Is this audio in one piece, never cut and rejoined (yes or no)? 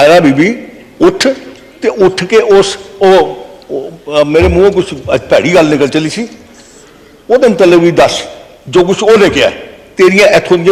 yes